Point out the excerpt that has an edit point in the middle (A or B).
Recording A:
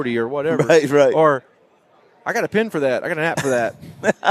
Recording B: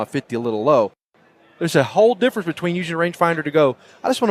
B